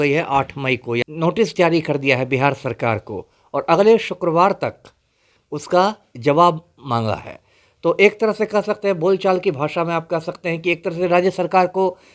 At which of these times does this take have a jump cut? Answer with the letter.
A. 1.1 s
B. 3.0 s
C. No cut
A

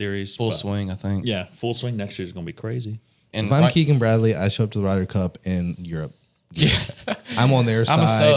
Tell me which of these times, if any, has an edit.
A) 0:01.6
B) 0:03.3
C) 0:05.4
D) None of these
B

